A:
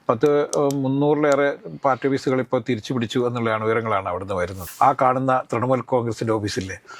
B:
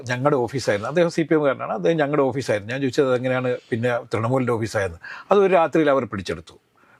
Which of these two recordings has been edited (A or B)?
A